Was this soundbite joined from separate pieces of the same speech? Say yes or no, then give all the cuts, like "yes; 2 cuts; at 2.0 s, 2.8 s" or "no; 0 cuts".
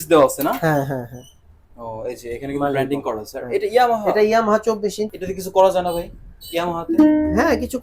yes; 1 cut; at 5.0 s